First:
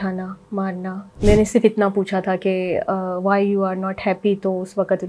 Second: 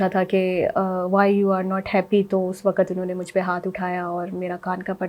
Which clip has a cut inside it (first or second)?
first